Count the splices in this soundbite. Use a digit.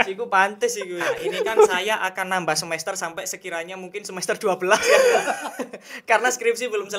1